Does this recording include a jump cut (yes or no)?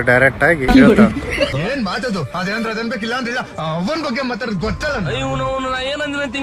yes